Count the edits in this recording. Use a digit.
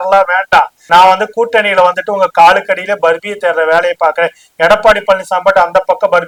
0